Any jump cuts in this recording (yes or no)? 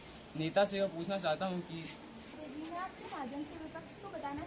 yes